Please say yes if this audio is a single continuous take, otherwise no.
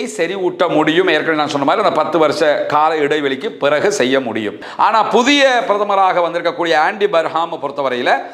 no